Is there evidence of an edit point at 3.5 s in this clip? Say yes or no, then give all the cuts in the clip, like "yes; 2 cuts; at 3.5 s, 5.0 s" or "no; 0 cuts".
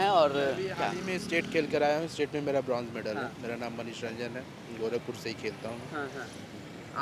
no; 0 cuts